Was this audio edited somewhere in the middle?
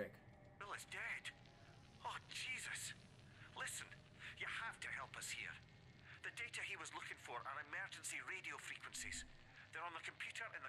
no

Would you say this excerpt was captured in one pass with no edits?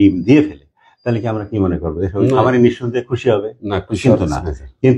yes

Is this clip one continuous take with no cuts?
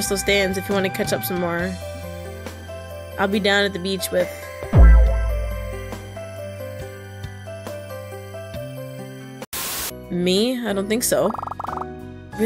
no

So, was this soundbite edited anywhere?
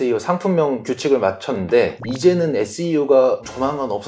no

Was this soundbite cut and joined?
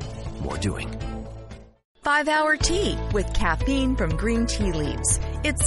no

